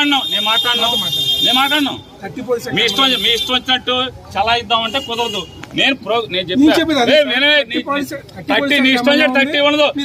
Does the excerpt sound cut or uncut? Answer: uncut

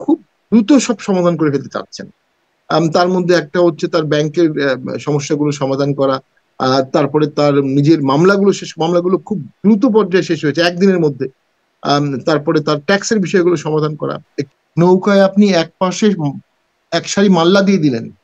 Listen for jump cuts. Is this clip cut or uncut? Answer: cut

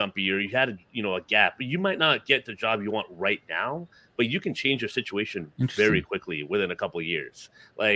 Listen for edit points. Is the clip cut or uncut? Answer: uncut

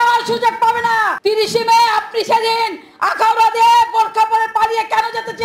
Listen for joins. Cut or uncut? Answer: cut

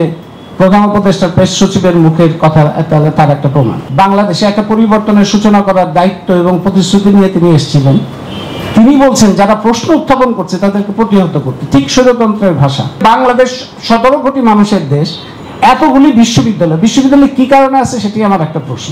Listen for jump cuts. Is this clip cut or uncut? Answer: cut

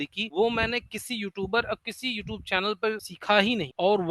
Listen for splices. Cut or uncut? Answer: cut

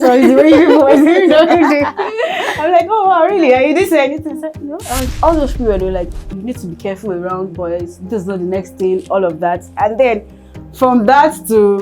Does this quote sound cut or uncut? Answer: cut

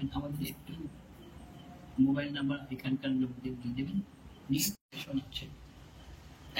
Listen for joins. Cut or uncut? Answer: cut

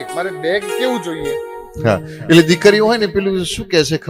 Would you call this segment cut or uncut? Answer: uncut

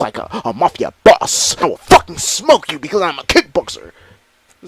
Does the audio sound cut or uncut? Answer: cut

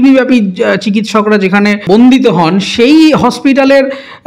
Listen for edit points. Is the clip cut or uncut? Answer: cut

